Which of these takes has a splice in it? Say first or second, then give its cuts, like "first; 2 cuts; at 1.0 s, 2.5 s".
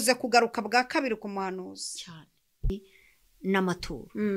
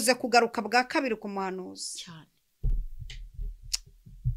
first; 1 cut; at 2.7 s